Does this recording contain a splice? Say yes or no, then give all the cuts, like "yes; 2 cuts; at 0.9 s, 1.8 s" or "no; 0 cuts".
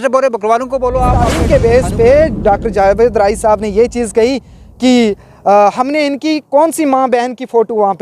yes; 1 cut; at 1.4 s